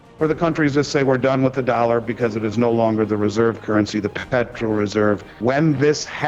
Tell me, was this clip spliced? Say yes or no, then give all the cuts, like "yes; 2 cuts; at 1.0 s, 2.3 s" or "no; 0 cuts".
yes; 2 cuts; at 4.2 s, 5.4 s